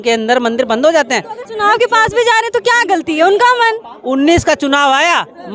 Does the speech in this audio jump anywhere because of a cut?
no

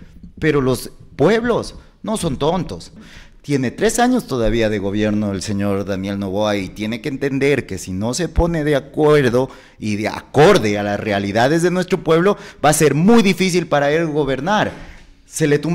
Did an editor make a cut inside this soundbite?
yes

